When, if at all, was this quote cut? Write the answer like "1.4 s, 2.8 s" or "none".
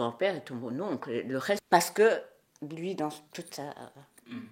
1.6 s